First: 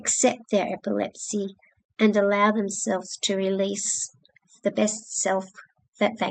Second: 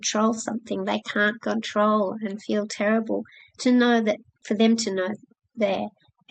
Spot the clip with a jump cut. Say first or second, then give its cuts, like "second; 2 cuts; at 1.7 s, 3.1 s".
second; 1 cut; at 4.4 s